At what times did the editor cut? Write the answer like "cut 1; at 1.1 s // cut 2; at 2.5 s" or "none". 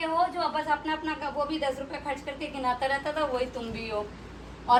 none